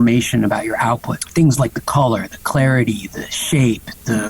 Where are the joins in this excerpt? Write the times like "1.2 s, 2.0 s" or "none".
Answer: 1.2 s